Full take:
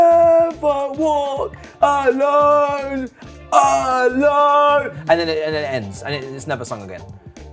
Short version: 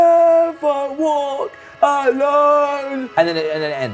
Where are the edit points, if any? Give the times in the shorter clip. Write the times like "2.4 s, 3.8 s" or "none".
3.0 s